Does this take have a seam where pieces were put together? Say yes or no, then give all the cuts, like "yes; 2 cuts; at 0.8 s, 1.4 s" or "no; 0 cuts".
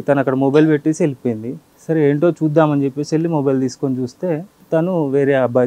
no; 0 cuts